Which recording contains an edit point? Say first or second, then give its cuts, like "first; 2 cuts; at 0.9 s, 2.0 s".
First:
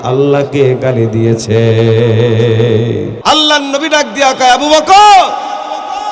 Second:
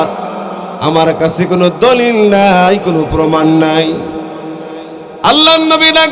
first; 1 cut; at 3.1 s